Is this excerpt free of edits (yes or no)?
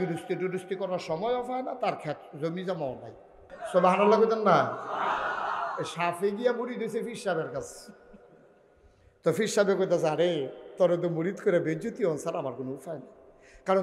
no